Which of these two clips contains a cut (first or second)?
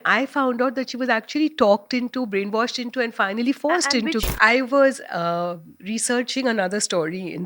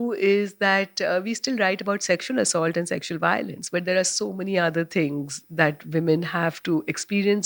first